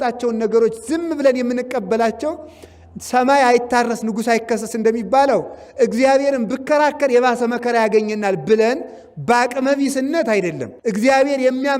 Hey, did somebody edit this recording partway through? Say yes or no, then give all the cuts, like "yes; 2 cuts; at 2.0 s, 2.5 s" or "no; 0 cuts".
yes; 1 cut; at 10.7 s